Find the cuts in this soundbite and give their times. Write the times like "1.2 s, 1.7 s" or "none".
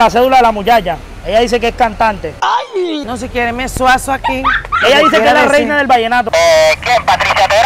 4.7 s, 6.3 s